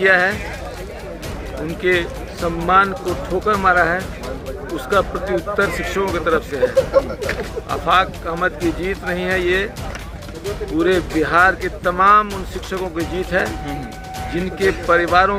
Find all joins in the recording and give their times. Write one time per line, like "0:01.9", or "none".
none